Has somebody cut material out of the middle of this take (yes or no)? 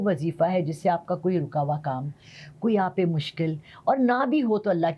no